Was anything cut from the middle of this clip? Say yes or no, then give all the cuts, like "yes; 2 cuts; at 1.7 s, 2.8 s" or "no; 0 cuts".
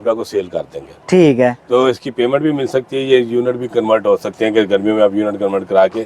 no; 0 cuts